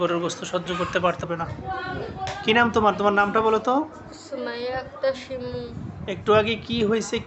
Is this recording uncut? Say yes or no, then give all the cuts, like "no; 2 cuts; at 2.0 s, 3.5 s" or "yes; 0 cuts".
no; 1 cut; at 1.2 s